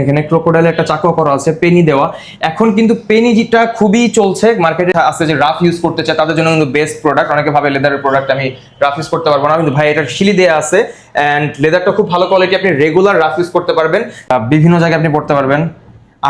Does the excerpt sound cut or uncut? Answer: cut